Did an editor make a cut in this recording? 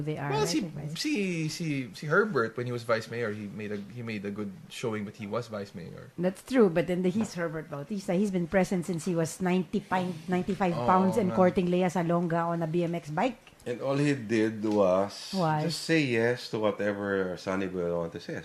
no; 0 cuts

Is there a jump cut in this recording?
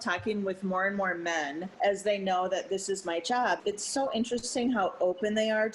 yes; 1 cut; at 3.6 s

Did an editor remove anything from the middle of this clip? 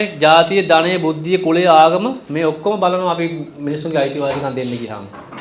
no; 0 cuts

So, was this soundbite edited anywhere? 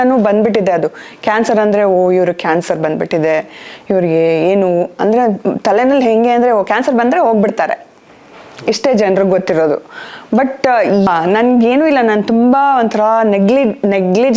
yes; 1 cut; at 11.1 s

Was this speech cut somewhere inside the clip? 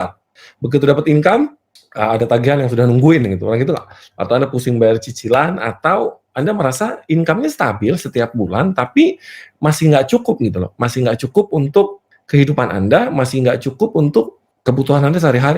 yes; 1 cut; at 14.4 s

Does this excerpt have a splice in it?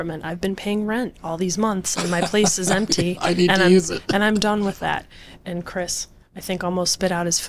no; 0 cuts

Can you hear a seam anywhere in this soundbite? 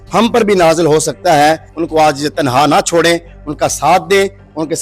yes; 1 cut; at 1.7 s

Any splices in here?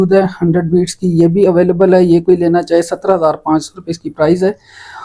no; 0 cuts

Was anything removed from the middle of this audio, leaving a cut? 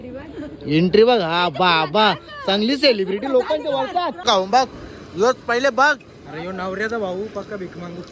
yes; 1 cut; at 4.2 s

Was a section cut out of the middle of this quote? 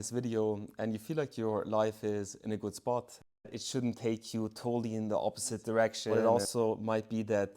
yes; 2 cuts; at 3.5 s, 6.1 s

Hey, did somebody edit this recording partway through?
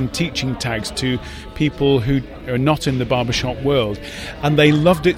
no; 0 cuts

